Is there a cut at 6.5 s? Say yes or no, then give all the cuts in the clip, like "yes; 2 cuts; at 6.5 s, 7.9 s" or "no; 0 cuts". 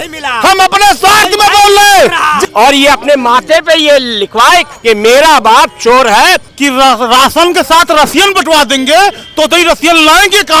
yes; 2 cuts; at 2.5 s, 6.5 s